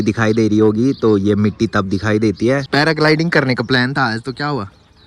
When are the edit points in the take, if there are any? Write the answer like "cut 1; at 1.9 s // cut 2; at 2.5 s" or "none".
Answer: cut 1; at 2.7 s